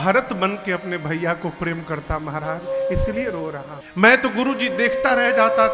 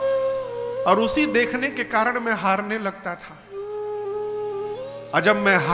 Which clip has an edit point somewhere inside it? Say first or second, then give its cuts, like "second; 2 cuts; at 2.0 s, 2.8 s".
first; 1 cut; at 3.7 s